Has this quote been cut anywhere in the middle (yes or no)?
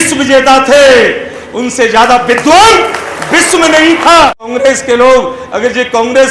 yes